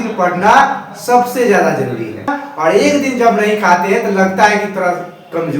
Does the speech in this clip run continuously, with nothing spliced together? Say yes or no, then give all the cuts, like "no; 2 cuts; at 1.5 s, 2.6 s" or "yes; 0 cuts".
no; 1 cut; at 2.4 s